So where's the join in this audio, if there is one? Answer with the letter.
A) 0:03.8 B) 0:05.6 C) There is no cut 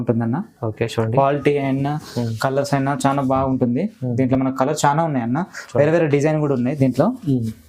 C